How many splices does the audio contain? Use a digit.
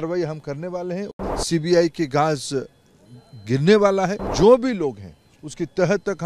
2